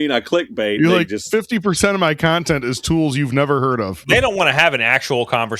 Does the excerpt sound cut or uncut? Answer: cut